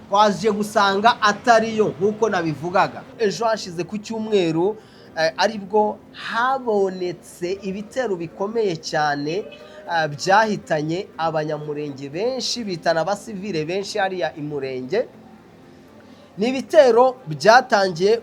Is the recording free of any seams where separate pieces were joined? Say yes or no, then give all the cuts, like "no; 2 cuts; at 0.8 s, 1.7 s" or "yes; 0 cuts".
no; 1 cut; at 3.1 s